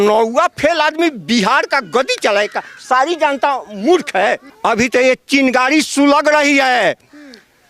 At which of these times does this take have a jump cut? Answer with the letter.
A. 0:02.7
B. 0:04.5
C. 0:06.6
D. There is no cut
B